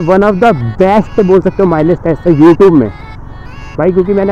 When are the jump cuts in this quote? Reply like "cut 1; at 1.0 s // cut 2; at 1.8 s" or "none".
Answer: none